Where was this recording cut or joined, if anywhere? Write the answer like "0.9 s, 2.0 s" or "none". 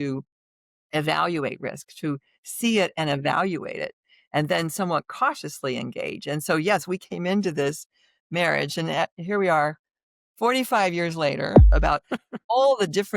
11.7 s